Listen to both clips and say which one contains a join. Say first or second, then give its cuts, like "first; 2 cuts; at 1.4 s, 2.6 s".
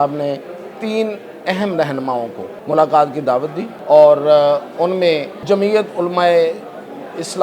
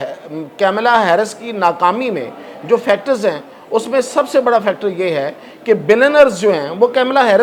first; 3 cuts; at 2.5 s, 3.7 s, 5.3 s